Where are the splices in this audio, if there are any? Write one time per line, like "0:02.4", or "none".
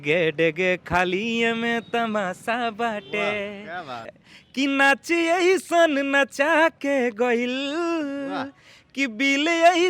0:04.1